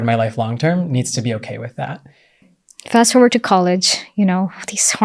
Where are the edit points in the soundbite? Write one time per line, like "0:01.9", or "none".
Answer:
0:02.5